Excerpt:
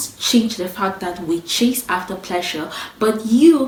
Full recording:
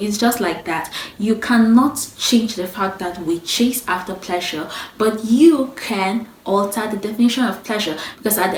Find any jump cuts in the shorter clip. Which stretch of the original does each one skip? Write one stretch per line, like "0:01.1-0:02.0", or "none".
none